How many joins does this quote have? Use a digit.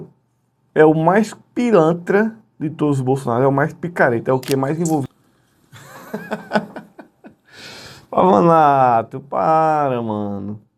1